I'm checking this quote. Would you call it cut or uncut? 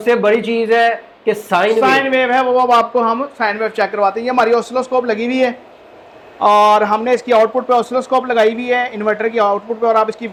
uncut